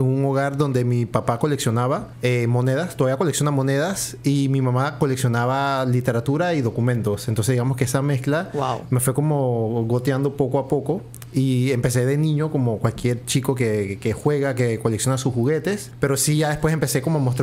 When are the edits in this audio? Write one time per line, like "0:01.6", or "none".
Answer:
0:02.1
0:15.9